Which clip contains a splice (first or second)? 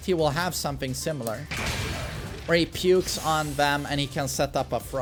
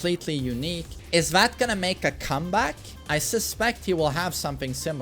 second